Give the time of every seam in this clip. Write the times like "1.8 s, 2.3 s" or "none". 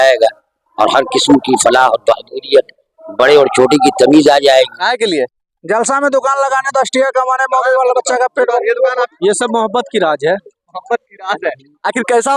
4.8 s, 9.1 s